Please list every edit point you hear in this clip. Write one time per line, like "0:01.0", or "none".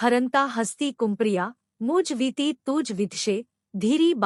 none

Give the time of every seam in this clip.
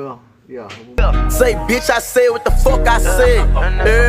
0:01.0

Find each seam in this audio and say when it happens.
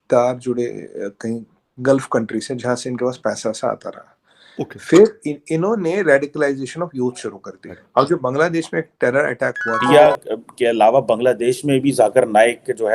0:09.8

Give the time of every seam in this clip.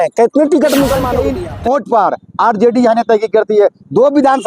0:01.4

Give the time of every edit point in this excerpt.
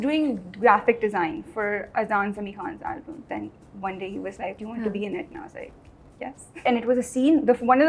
0:03.2
0:04.6
0:06.6

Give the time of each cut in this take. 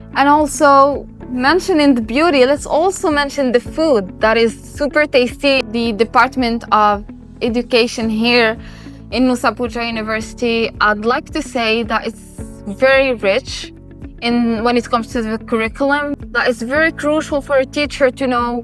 0:05.6
0:16.1

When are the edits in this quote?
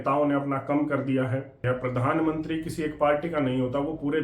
0:01.5

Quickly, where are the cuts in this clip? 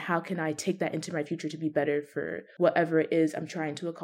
0:02.4

